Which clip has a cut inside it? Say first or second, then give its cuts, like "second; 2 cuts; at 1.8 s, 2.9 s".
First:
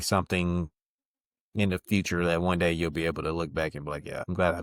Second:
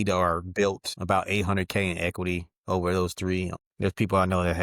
second; 1 cut; at 3.6 s